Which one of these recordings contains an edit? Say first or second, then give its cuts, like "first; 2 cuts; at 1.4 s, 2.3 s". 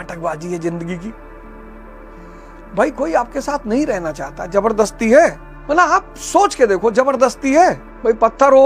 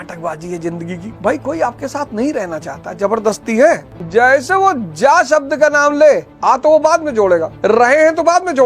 second; 4 cuts; at 1.1 s, 3.9 s, 6.3 s, 7.5 s